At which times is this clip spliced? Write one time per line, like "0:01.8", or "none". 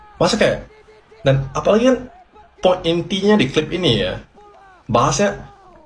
none